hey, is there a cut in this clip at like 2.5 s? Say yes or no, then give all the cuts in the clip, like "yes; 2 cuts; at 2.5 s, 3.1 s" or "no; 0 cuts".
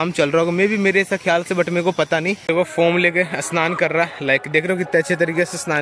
yes; 1 cut; at 2.5 s